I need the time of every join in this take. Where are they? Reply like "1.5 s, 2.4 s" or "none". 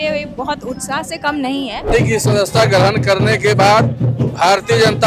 1.9 s